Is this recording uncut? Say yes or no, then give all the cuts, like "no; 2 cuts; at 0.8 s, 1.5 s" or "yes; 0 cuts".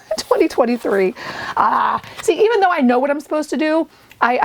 yes; 0 cuts